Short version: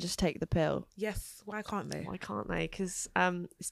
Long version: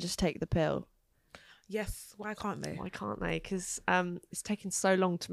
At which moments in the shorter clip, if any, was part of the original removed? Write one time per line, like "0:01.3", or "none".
0:00.9